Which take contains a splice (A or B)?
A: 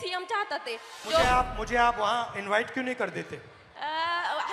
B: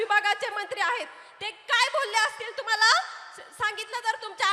A